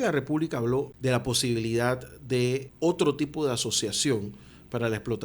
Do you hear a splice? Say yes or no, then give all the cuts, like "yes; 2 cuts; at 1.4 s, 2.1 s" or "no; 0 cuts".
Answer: yes; 2 cuts; at 0.9 s, 2.7 s